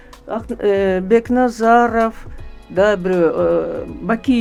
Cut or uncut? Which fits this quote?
uncut